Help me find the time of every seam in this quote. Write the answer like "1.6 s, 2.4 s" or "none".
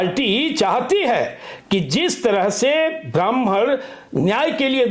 none